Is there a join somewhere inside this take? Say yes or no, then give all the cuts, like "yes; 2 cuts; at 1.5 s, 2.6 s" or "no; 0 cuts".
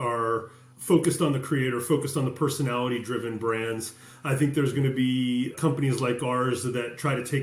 no; 0 cuts